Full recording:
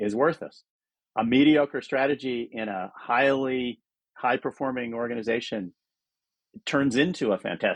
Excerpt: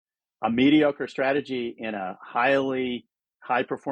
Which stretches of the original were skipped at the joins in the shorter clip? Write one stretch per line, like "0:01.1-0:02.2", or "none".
none

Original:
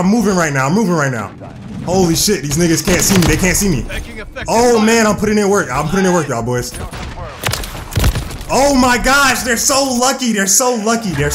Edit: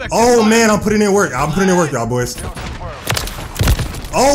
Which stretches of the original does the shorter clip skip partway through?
none

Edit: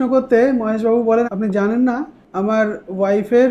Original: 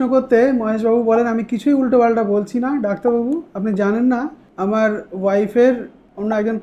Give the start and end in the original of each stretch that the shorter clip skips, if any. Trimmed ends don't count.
0:01.3-0:03.5

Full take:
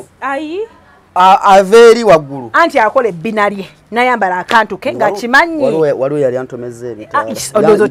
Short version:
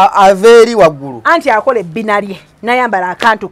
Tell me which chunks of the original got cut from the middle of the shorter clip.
none

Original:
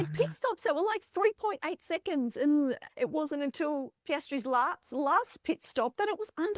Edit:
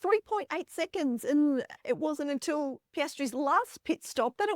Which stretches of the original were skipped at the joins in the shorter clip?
0:04.4-0:04.9

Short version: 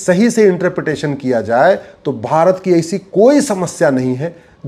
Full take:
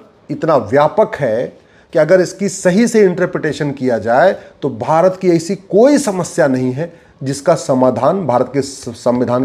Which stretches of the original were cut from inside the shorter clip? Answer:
none

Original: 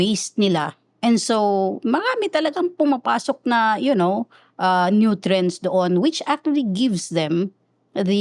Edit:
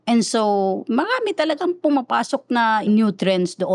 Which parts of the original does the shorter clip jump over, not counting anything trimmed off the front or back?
0:03.8-0:04.9

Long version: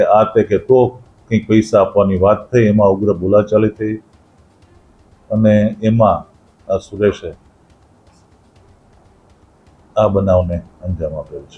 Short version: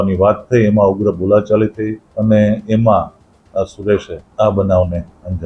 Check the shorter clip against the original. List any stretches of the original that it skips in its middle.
0:04.0-0:05.2
0:07.3-0:09.8

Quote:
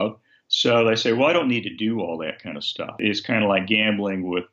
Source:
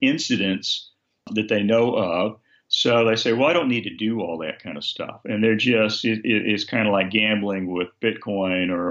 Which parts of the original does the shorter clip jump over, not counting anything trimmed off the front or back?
0:05.2-0:06.4

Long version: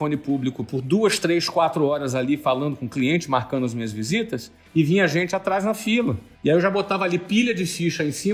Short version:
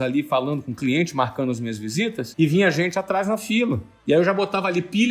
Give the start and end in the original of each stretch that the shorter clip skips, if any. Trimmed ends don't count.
0:04.4-0:04.6

